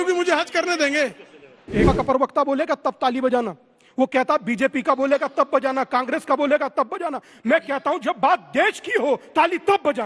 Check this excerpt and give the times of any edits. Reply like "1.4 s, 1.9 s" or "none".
1.9 s